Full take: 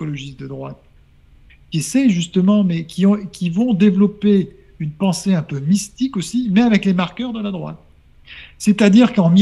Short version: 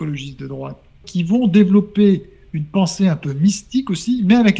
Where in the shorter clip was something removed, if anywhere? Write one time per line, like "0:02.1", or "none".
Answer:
0:01.1